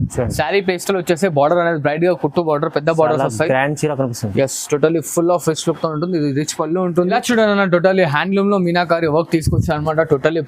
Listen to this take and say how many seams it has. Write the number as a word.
one